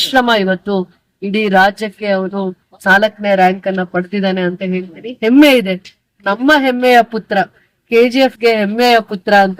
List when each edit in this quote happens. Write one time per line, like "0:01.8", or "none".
none